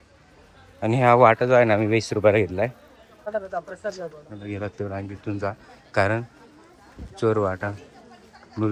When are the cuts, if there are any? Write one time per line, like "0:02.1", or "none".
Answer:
0:03.3